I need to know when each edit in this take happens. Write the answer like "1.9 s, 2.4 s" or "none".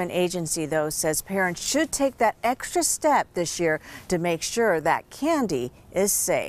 none

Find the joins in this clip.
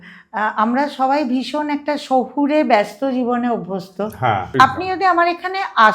4.5 s

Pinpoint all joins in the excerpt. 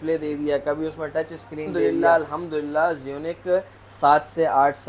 1.9 s

